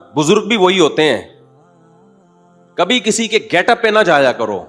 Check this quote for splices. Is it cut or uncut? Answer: uncut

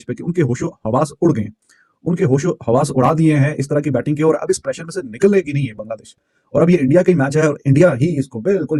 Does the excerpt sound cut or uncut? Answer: uncut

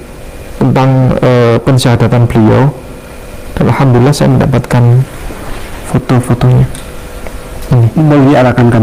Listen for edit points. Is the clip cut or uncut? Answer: uncut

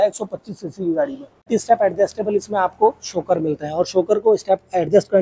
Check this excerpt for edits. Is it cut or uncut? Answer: cut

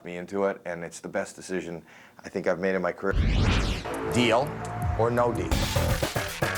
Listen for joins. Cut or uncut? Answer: cut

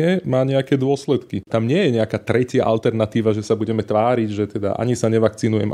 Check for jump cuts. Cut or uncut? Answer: cut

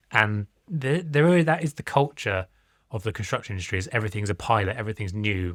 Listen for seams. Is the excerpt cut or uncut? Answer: uncut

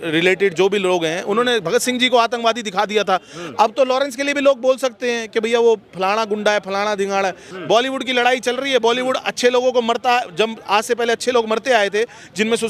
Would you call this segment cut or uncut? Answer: cut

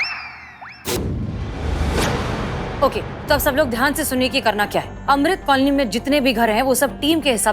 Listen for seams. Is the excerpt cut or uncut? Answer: cut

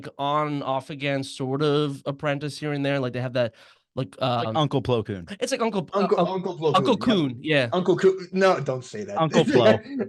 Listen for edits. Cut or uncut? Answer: uncut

